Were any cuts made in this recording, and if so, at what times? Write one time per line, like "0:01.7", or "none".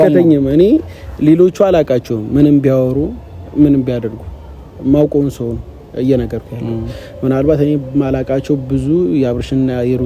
none